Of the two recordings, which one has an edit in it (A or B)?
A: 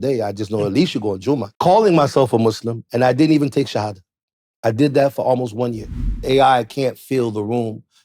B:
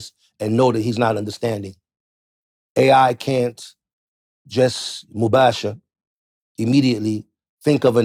A